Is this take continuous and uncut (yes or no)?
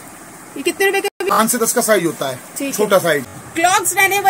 no